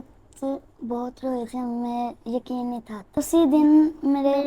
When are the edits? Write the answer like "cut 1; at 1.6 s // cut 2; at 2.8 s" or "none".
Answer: cut 1; at 3.2 s